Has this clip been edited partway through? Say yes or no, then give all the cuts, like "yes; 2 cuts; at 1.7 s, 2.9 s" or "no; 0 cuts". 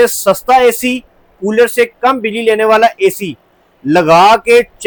no; 0 cuts